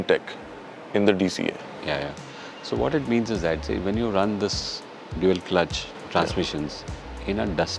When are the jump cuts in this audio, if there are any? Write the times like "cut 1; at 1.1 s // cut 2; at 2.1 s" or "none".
none